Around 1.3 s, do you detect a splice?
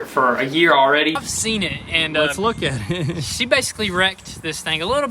yes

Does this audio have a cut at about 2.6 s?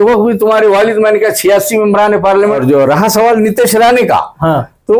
yes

